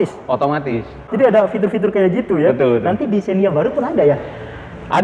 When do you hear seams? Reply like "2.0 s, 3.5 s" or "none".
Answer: 1.0 s